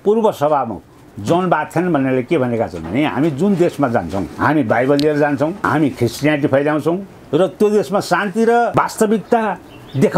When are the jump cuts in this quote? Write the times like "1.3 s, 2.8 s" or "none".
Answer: 4.3 s, 5.6 s, 8.7 s